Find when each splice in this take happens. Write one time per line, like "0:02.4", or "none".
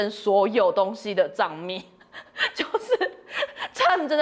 none